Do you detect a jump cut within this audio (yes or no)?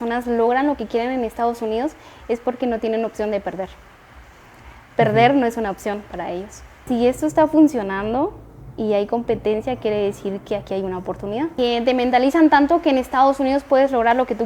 yes